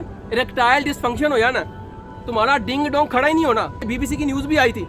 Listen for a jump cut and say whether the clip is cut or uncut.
cut